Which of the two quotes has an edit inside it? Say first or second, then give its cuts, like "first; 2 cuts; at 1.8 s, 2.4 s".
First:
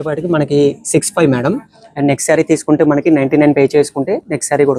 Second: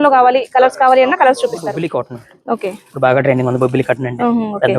second; 1 cut; at 1.8 s